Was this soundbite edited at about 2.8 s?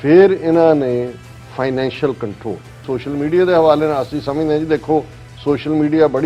yes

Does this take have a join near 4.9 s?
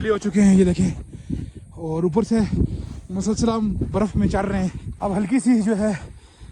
yes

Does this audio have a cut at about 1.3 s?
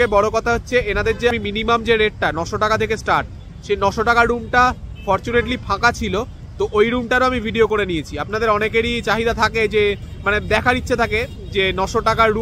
yes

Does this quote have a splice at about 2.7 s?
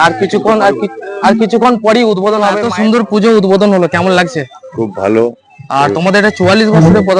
yes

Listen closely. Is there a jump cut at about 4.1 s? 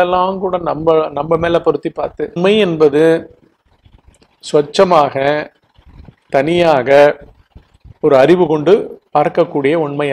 no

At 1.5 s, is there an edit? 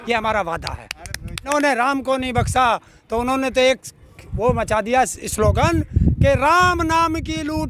yes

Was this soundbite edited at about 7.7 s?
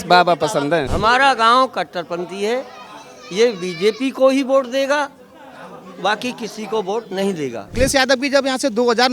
yes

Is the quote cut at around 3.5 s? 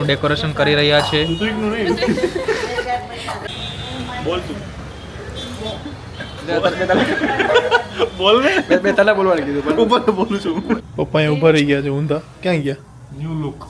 yes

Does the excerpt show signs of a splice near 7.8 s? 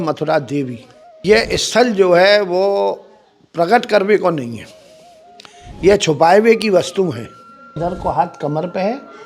yes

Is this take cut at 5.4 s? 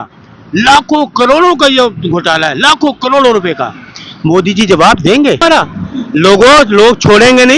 yes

